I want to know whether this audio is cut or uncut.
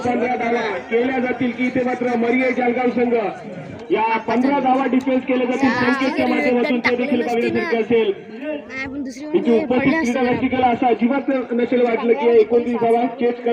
uncut